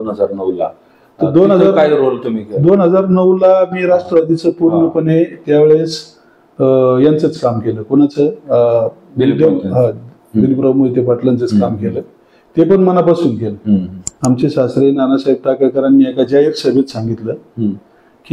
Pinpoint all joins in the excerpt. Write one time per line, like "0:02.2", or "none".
0:14.1